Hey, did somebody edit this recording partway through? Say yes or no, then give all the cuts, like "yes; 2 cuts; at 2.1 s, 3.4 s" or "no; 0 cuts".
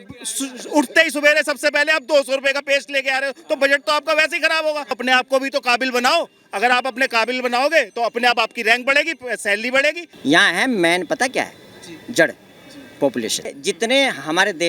yes; 3 cuts; at 5.0 s, 10.1 s, 13.5 s